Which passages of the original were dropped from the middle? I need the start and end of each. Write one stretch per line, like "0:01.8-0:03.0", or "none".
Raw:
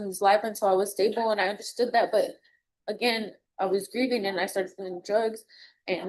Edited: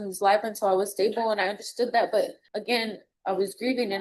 0:02.5-0:02.8